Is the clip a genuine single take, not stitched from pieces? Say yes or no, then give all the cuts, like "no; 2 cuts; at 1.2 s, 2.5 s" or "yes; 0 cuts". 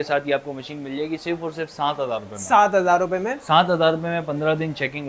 yes; 0 cuts